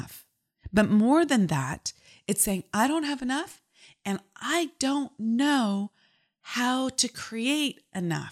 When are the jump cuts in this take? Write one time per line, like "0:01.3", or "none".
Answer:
none